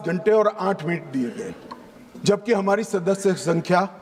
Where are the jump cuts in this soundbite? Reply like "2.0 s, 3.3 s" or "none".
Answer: none

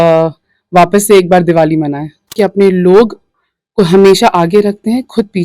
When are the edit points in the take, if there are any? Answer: 2.4 s

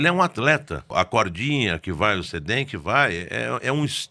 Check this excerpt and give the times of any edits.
0.9 s

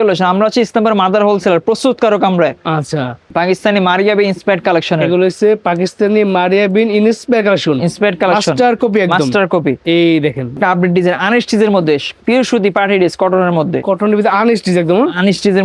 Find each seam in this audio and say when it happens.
3.2 s, 10.5 s, 12.1 s

